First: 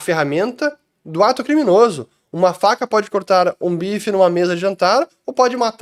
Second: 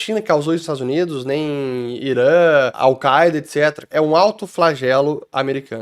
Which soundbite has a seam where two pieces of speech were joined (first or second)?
second